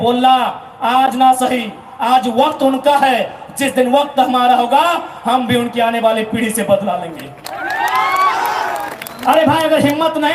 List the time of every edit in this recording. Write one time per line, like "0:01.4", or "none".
0:08.9